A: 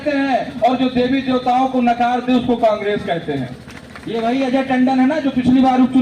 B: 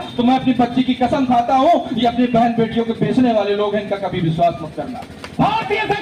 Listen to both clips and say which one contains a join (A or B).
A